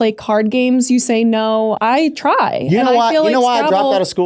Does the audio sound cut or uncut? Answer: cut